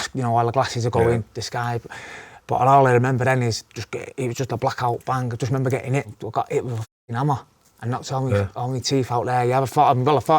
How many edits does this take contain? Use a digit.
2